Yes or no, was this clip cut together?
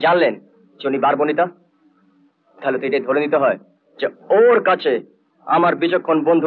no